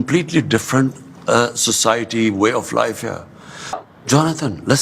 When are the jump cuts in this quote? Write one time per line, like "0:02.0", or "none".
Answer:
0:03.8